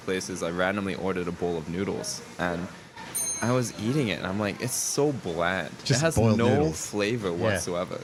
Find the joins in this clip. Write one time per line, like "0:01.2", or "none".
none